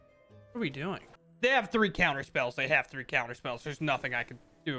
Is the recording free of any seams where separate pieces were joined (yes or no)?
no